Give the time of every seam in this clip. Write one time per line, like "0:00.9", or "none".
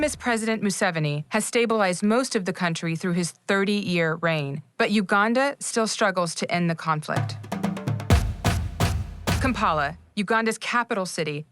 0:08.7
0:10.6

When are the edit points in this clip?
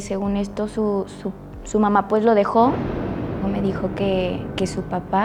0:03.4

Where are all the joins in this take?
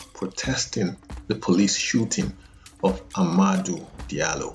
none

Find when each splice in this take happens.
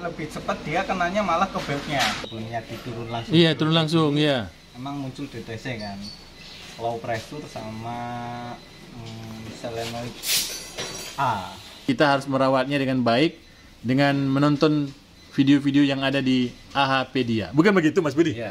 0:02.1
0:11.7

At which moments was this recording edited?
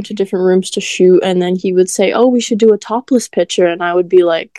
none

